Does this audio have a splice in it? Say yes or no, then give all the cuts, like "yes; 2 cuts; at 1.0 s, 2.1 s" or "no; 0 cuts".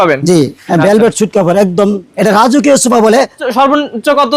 yes; 2 cuts; at 2.1 s, 3.5 s